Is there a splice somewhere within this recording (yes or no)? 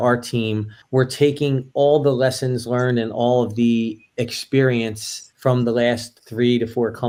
no